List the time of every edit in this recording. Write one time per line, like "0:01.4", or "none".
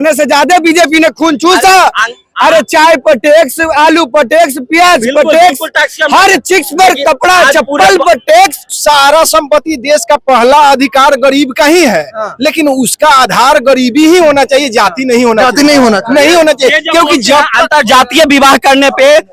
0:08.7